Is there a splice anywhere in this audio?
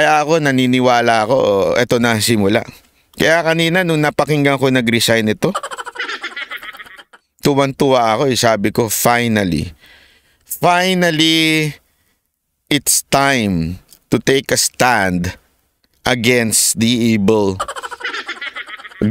no; 0 cuts

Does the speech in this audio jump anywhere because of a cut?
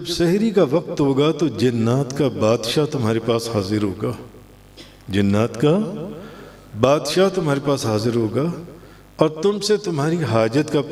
no; 0 cuts

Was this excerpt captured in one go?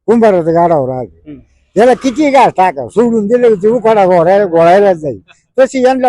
yes; 0 cuts

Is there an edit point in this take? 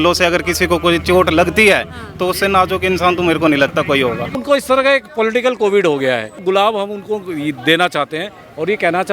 yes; 2 cuts; at 4.3 s, 6.4 s

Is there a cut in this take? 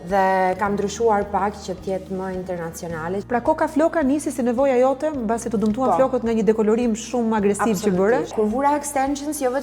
yes; 2 cuts; at 3.2 s, 8.3 s

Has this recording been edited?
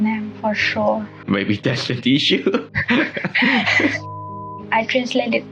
yes; 3 cuts; at 1.2 s, 2.7 s, 4.1 s

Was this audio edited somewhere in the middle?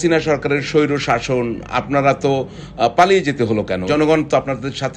yes; 1 cut; at 3.9 s

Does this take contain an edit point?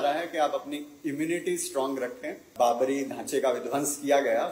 yes; 1 cut; at 2.5 s

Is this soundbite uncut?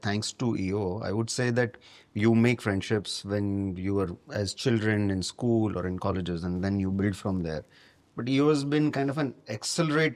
yes; 0 cuts

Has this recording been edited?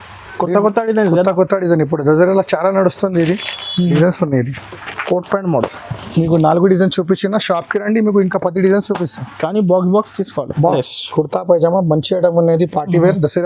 yes; 2 cuts; at 4.0 s, 10.7 s

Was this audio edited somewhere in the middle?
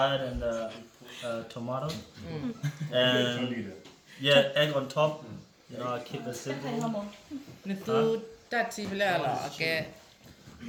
no; 0 cuts

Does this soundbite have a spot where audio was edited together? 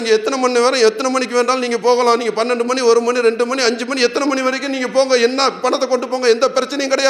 no; 0 cuts

